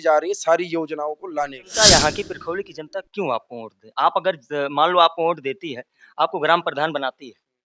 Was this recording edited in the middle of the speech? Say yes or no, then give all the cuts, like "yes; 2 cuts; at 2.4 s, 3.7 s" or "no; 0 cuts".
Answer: yes; 1 cut; at 1.6 s